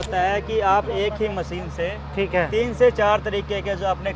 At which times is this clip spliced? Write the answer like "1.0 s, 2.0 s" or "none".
none